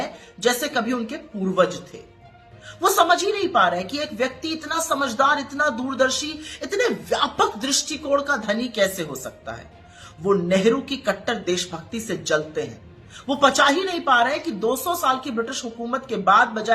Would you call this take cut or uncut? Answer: uncut